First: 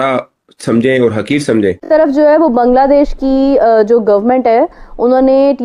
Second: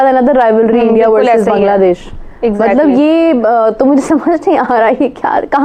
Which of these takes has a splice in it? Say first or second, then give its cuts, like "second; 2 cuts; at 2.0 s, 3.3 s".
first; 1 cut; at 1.9 s